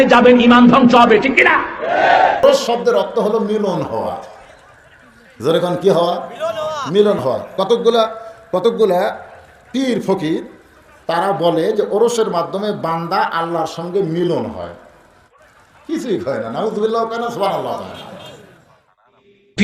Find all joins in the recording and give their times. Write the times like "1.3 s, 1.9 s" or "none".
2.4 s